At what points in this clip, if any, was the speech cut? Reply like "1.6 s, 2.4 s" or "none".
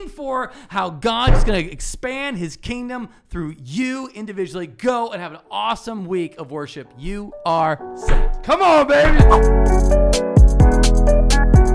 9.1 s